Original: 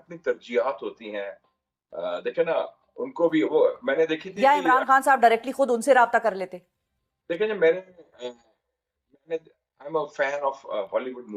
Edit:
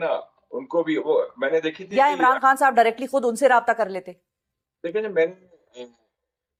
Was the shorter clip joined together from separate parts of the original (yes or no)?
no